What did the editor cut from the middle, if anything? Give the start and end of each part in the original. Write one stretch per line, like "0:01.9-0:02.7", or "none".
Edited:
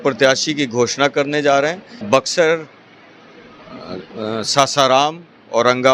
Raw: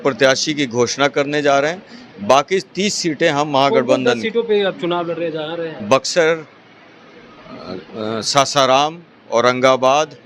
0:01.9-0:05.7